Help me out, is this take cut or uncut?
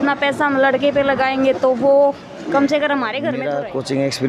cut